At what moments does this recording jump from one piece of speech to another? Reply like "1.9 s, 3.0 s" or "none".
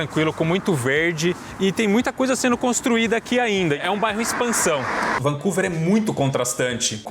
1.5 s, 3.8 s, 5.2 s